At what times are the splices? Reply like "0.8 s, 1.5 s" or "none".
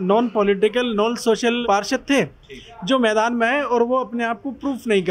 none